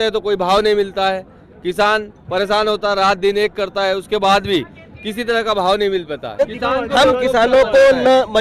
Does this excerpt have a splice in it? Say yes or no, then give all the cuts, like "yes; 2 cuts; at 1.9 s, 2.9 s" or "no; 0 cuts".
yes; 1 cut; at 6.4 s